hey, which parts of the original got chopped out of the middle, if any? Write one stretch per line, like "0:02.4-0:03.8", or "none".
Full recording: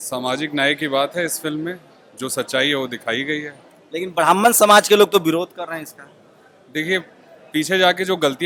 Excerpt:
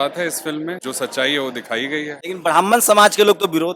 0:01.8-0:02.2
0:03.5-0:03.9